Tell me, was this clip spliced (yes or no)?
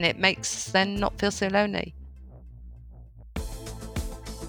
yes